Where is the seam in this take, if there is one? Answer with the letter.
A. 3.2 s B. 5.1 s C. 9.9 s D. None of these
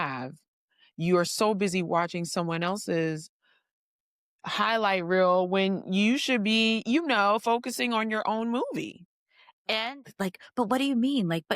C